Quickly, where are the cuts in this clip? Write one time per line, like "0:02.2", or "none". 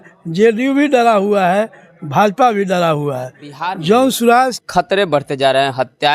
0:04.6